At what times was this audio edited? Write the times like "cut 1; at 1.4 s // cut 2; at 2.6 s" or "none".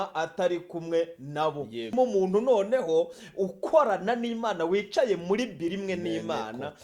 cut 1; at 1.9 s